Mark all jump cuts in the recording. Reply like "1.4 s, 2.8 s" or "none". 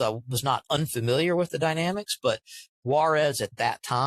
2.7 s